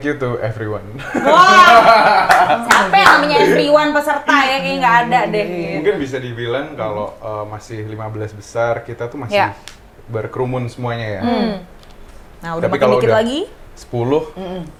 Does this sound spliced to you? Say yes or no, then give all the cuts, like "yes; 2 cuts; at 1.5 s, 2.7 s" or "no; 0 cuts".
no; 0 cuts